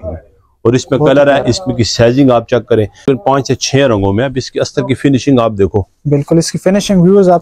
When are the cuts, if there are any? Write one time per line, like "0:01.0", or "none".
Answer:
0:03.1